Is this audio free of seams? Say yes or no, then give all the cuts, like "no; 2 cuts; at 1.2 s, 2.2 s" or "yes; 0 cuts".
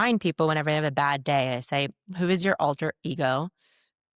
yes; 0 cuts